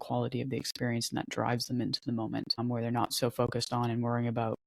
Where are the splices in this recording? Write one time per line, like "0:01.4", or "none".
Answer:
0:02.6